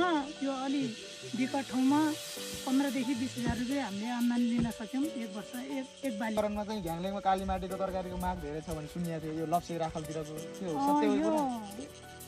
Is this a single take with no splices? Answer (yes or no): no